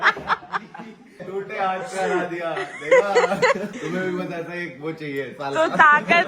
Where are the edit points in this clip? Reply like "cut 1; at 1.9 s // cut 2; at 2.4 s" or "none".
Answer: cut 1; at 1.1 s // cut 2; at 3.7 s